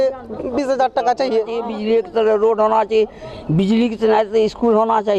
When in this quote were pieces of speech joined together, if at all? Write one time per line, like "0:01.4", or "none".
0:01.7